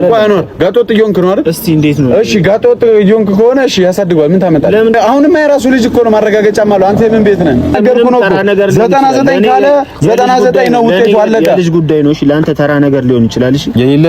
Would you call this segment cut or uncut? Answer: cut